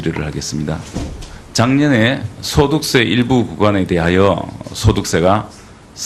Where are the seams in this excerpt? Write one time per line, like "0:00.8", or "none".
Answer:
0:03.5